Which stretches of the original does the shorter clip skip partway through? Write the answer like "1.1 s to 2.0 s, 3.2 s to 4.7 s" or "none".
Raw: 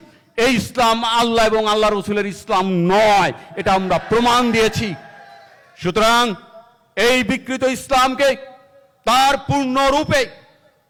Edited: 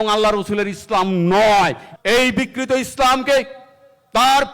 3.4 s to 6.8 s